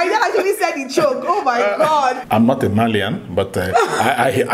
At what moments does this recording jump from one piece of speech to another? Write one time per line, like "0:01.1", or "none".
0:02.2